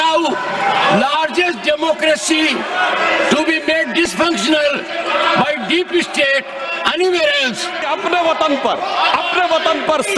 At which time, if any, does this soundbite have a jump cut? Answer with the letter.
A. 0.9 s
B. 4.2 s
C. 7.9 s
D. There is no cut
C